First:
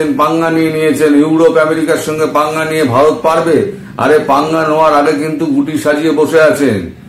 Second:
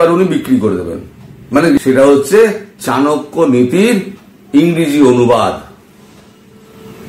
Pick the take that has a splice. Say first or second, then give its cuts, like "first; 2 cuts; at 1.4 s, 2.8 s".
second; 1 cut; at 1.8 s